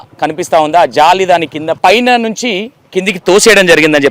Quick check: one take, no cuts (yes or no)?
no